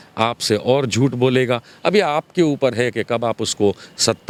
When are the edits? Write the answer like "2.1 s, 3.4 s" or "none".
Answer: none